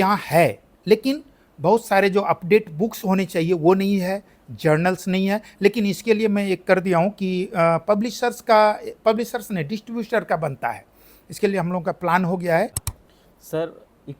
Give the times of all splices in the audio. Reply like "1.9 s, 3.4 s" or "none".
12.9 s